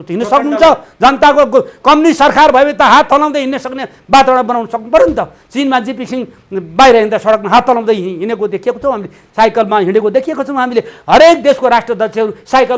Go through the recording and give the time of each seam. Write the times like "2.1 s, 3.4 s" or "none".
none